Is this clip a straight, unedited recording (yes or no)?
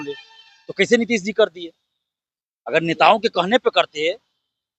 yes